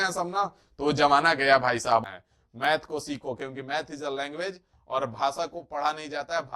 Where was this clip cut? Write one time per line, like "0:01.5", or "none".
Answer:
0:02.0